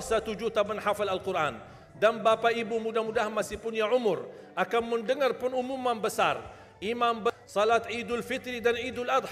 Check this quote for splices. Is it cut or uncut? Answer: cut